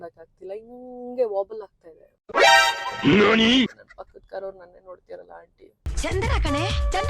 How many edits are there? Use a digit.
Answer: 2